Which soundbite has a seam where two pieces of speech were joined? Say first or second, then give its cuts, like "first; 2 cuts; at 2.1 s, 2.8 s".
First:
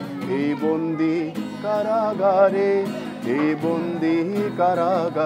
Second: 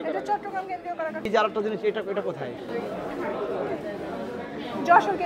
second; 1 cut; at 1.3 s